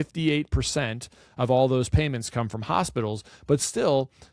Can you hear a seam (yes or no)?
no